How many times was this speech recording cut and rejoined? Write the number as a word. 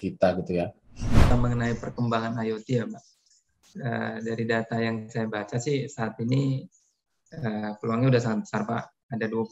one